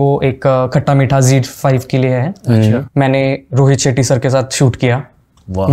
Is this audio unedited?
no; 1 cut; at 2.9 s

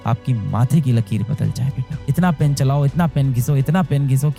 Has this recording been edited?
no; 0 cuts

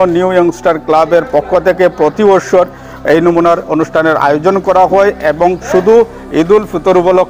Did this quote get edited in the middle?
no; 0 cuts

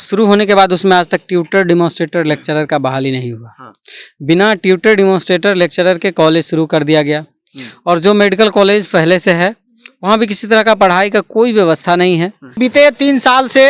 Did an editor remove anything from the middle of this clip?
yes; 1 cut; at 12.6 s

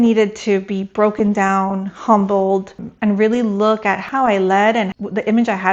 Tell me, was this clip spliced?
yes; 3 cuts; at 2.8 s, 4.0 s, 4.9 s

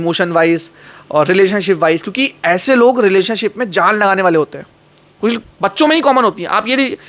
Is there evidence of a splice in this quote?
yes; 1 cut; at 5.5 s

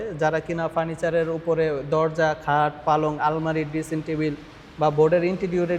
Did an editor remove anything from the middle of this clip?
no; 0 cuts

